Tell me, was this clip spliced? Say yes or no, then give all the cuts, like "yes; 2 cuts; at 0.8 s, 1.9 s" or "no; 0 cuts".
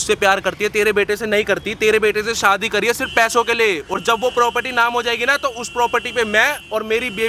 no; 0 cuts